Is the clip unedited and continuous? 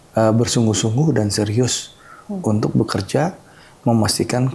yes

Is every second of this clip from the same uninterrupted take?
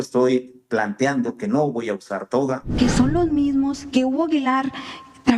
no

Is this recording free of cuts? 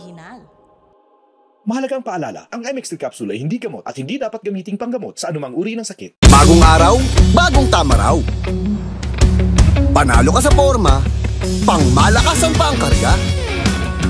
no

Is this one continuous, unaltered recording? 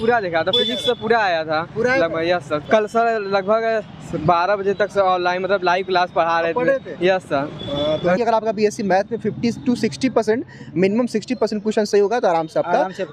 no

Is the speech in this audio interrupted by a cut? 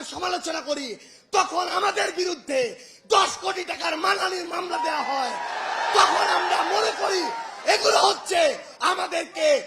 no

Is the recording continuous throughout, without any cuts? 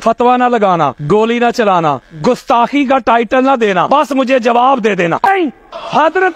no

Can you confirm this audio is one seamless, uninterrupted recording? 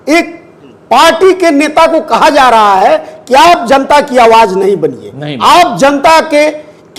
yes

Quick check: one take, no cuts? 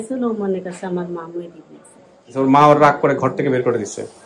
no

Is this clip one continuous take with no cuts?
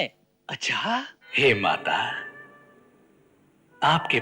no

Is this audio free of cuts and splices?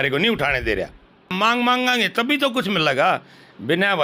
no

